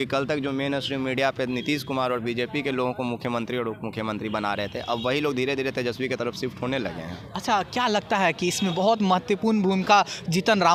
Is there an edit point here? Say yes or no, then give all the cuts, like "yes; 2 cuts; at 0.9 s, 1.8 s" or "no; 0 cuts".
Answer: no; 0 cuts